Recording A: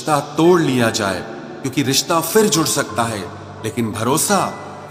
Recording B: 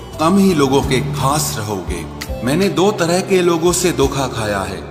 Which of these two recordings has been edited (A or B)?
B